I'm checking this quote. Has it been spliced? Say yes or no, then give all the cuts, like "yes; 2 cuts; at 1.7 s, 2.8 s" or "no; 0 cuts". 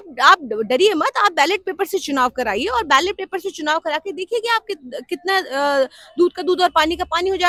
no; 0 cuts